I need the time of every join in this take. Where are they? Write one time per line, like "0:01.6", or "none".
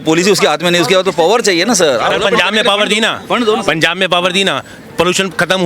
0:02.1